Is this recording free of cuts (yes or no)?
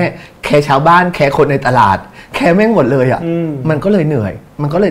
yes